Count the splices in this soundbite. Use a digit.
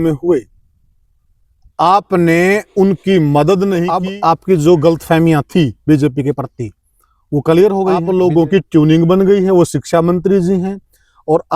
2